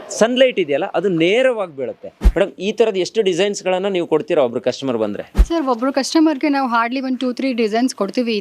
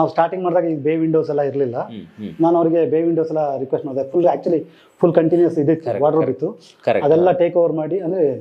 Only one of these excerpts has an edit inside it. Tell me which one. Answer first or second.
first